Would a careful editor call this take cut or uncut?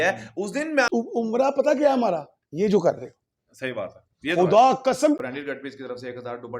cut